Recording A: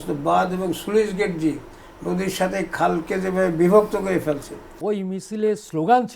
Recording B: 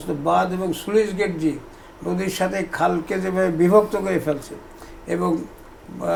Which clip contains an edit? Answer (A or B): A